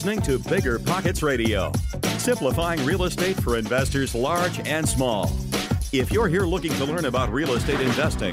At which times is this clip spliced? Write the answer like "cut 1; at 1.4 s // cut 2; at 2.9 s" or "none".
none